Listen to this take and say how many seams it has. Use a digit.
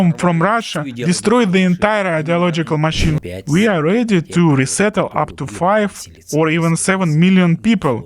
1